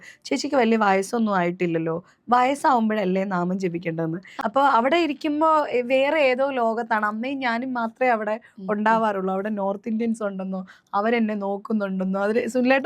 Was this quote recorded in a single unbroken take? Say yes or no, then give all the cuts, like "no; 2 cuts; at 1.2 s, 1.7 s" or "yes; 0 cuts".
no; 1 cut; at 4.2 s